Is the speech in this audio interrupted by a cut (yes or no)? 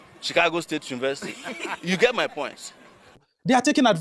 yes